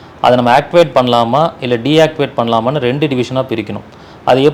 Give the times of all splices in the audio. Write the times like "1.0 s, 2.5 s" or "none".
none